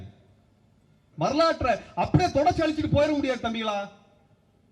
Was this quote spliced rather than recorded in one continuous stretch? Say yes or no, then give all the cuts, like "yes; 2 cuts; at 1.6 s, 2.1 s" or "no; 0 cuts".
yes; 1 cut; at 1.0 s